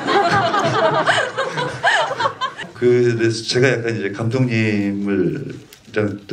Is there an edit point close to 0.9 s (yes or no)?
no